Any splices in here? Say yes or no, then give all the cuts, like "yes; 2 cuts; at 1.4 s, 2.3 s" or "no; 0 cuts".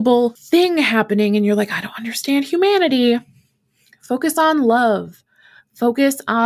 no; 0 cuts